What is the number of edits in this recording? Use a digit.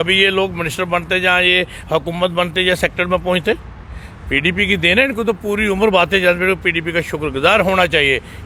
0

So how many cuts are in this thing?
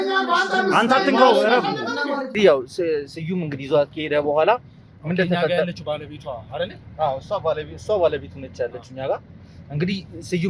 1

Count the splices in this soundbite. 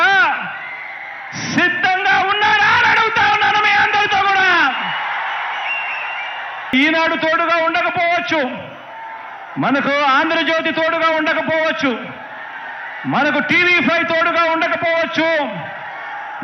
1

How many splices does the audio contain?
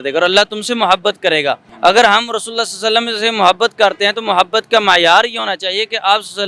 1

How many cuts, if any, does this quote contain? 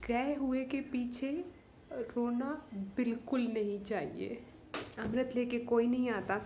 1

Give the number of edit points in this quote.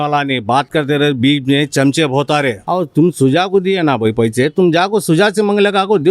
1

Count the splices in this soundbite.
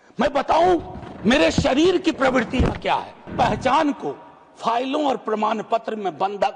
1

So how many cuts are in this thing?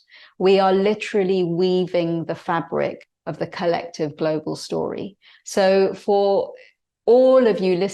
0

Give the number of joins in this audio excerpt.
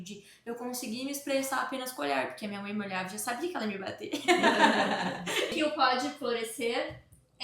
1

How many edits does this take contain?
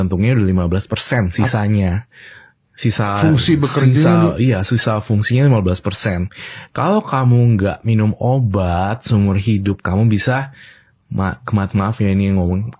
0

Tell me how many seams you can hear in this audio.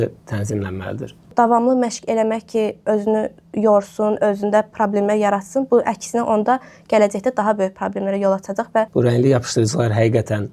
2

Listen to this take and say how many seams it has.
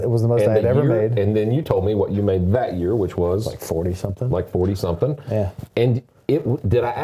0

